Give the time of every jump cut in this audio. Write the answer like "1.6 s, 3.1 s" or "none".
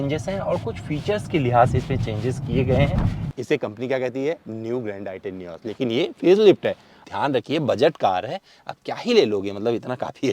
3.2 s, 7.0 s